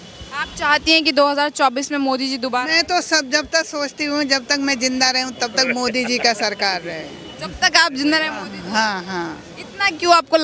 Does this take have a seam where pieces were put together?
no; 0 cuts

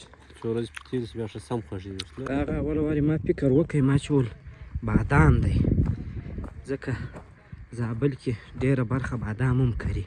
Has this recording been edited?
no; 0 cuts

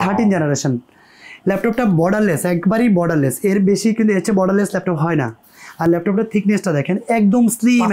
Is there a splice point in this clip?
no; 0 cuts

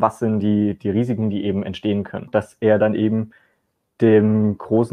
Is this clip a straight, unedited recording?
no; 1 cut; at 2.3 s

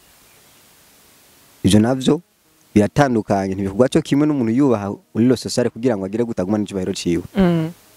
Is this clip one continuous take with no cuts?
yes; 0 cuts

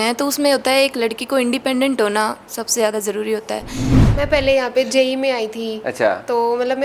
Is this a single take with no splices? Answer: no; 1 cut; at 3.9 s

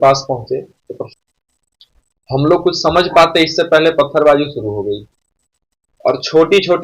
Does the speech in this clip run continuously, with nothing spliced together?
no; 1 cut; at 1.1 s

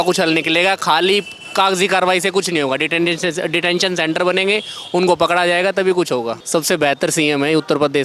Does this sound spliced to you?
yes; 1 cut; at 6.4 s

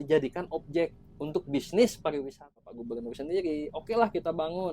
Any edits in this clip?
yes; 1 cut; at 2.7 s

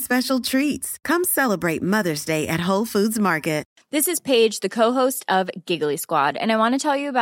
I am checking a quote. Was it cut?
yes; 1 cut; at 3.8 s

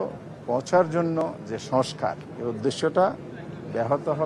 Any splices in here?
yes; 1 cut; at 2.3 s

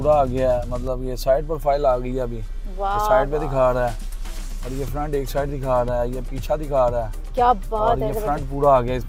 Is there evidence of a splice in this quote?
no; 0 cuts

